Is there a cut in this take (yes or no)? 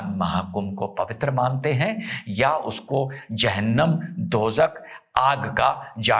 no